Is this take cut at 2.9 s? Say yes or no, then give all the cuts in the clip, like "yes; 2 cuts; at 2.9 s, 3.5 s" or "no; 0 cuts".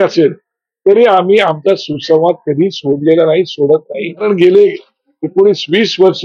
no; 1 cut; at 4.2 s